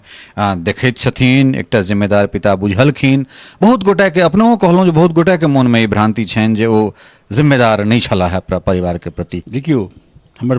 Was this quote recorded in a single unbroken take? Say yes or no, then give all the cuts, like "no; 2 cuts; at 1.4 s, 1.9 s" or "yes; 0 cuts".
no; 1 cut; at 9.4 s